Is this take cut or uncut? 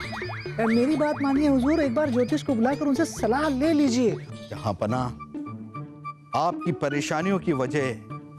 cut